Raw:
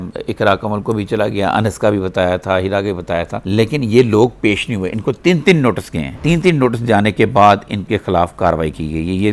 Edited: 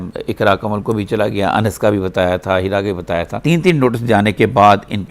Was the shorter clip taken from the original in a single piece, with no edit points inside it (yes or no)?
no